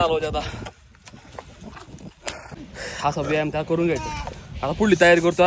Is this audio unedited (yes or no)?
no